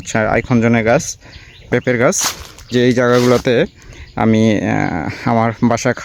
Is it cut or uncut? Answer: cut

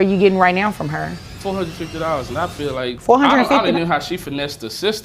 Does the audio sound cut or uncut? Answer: cut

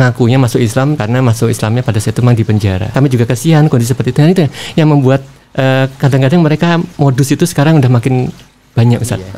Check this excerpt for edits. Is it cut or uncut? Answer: cut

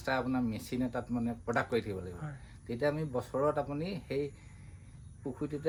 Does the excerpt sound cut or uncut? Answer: uncut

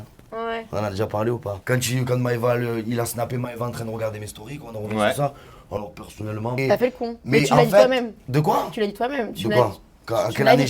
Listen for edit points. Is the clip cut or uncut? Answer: cut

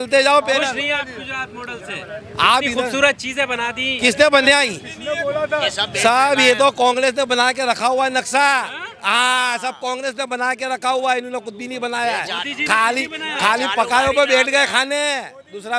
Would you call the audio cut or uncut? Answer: uncut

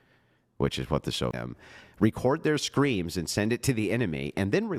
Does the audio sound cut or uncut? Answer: cut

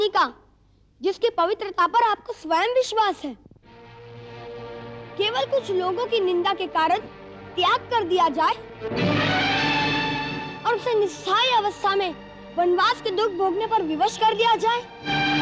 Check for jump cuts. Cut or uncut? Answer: uncut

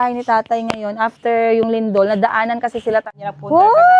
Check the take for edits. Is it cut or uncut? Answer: cut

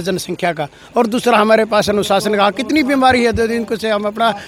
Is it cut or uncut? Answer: uncut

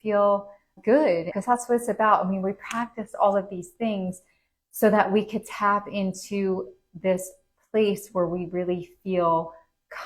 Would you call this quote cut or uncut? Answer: uncut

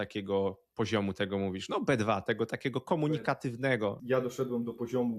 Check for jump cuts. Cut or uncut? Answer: cut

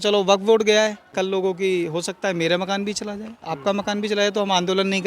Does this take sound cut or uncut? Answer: cut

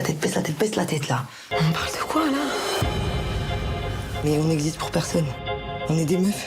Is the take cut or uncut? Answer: uncut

